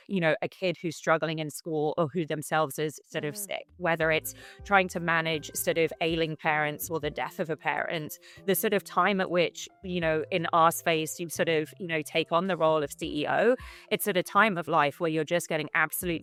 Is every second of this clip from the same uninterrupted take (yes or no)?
yes